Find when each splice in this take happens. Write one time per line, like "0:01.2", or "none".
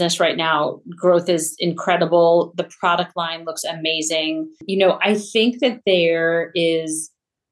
0:04.6